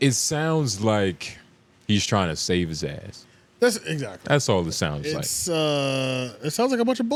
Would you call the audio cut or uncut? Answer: uncut